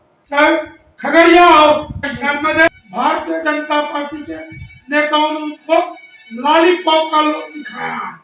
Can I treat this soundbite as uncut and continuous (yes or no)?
no